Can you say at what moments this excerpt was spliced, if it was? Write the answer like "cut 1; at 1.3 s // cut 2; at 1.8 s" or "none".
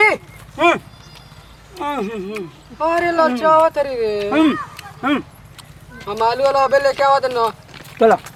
none

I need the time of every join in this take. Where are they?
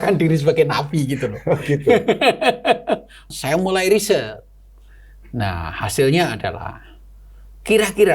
cut 1; at 3.2 s

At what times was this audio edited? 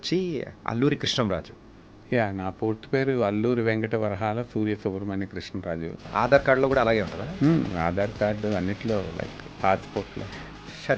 cut 1; at 6.0 s

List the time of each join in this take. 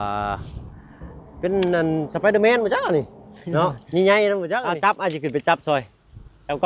cut 1; at 4.7 s

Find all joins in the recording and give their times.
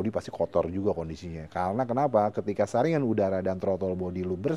none

